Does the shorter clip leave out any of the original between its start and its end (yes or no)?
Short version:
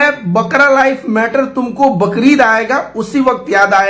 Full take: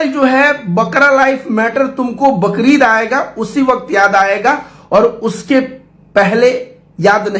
no